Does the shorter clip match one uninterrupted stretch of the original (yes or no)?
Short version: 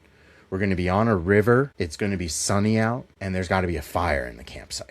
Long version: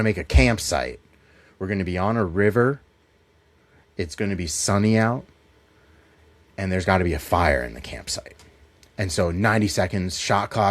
no